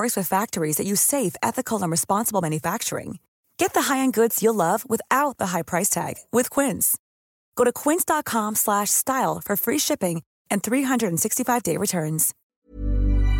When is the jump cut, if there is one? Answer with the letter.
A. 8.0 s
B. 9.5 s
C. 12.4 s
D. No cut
C